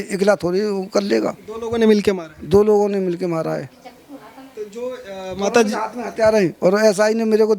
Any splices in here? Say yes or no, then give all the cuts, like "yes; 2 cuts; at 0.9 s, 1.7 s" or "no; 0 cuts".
no; 0 cuts